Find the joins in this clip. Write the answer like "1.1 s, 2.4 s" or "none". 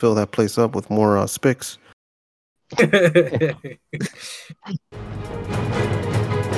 4.9 s